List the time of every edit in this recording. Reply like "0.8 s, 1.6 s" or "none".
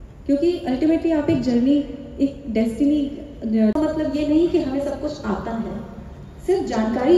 3.7 s